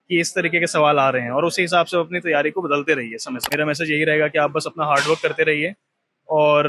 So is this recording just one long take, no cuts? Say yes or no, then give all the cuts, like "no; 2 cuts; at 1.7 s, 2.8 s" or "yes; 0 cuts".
no; 1 cut; at 3.4 s